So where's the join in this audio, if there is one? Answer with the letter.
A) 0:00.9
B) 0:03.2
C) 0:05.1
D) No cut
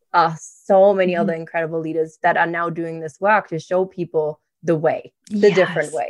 C